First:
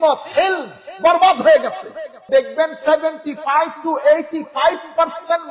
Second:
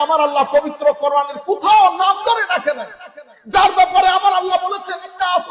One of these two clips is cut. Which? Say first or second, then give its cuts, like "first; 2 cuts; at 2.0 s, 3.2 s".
first; 1 cut; at 2.3 s